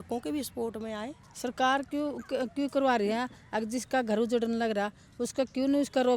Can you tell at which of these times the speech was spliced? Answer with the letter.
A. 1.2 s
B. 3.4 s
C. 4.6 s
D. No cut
A